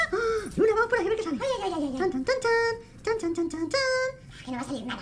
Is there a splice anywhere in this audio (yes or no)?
no